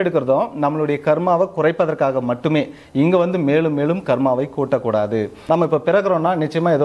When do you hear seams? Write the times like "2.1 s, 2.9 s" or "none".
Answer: 5.4 s